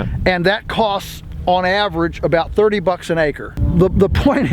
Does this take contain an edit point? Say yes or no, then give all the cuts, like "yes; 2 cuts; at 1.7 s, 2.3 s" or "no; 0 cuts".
yes; 1 cut; at 3.5 s